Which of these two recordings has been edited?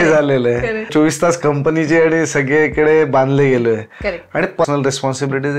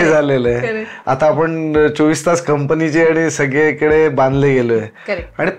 first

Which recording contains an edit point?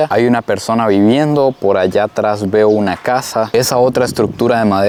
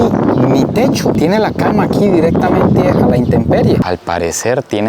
second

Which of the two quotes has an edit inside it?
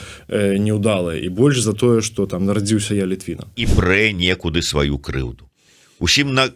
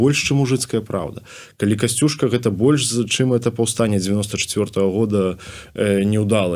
first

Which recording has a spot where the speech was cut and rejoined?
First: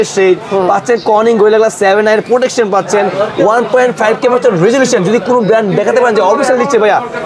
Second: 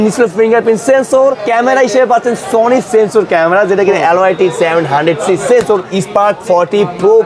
second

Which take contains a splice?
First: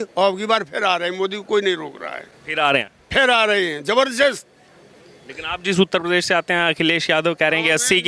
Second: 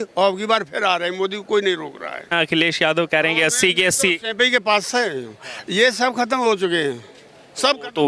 second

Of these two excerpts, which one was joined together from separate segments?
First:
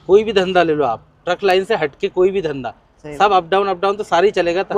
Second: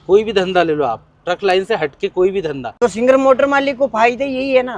second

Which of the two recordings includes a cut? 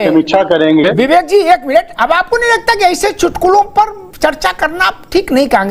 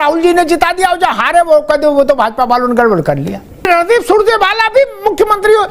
second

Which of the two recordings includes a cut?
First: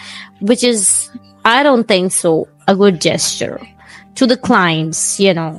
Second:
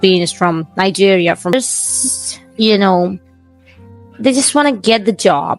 second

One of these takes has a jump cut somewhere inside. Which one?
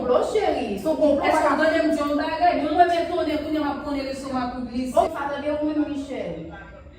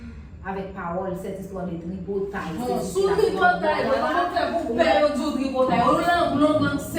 first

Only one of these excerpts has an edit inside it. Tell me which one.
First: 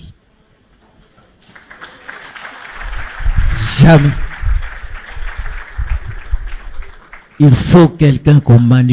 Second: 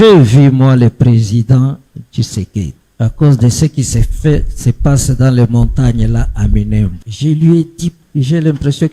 second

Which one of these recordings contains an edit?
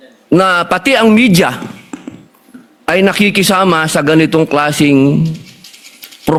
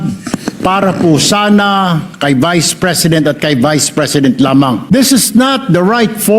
second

